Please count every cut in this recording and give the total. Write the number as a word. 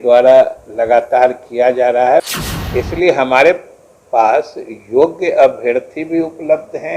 one